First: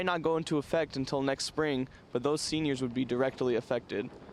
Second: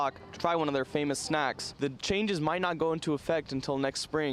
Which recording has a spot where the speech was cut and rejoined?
second; 1 cut; at 1.7 s

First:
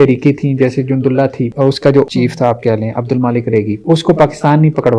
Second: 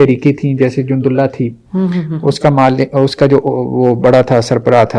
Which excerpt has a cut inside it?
first; 2 cuts; at 1.8 s, 3.8 s

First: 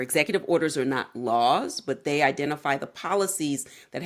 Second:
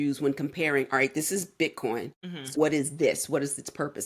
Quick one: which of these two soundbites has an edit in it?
second; 1 cut; at 2.6 s

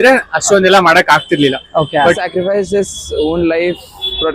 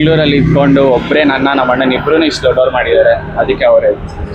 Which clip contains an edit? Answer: first; 1 cut; at 2.2 s

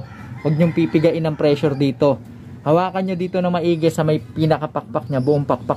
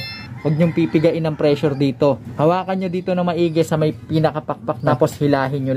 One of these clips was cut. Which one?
second; 2 cuts; at 2.3 s, 4.9 s

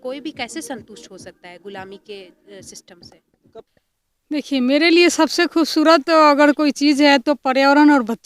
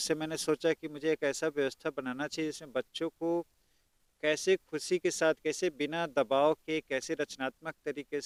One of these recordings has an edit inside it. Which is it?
first; 1 cut; at 3.7 s

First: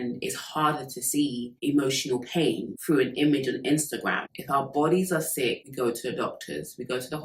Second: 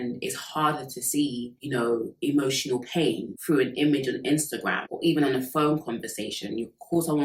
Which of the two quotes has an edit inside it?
first; 2 cuts; at 1.5 s, 4.3 s

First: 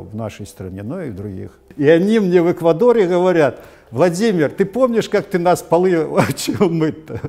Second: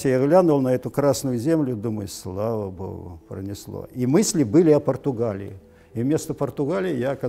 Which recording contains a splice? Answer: first; 1 cut; at 1.6 s

